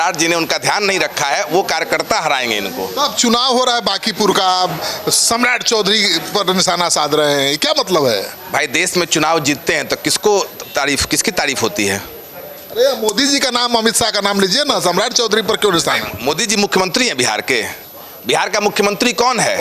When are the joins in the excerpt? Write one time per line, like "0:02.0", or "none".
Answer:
none

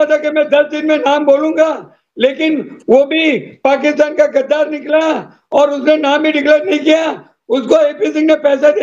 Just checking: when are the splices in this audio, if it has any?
none

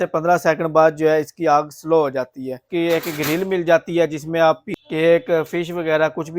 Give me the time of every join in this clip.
0:03.1
0:04.9

